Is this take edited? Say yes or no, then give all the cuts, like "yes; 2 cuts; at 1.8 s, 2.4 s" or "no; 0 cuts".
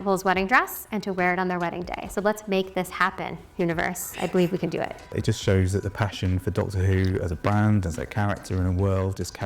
yes; 1 cut; at 5.2 s